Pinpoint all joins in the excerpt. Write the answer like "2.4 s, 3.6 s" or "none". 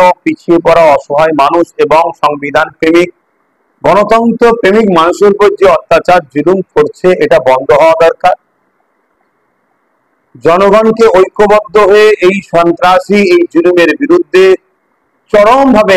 none